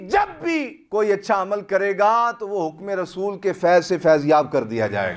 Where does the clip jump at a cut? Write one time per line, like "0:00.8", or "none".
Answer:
none